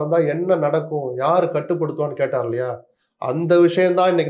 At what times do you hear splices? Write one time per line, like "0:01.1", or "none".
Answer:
none